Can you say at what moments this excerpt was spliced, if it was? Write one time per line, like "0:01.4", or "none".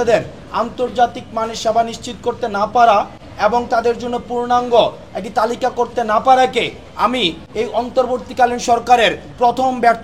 none